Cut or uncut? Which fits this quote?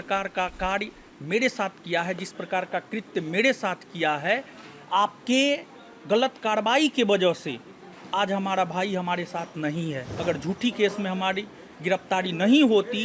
cut